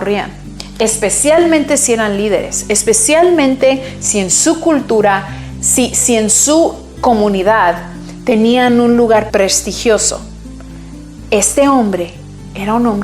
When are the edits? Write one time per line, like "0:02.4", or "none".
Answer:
0:09.3